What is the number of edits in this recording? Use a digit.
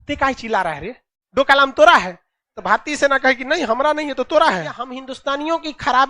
1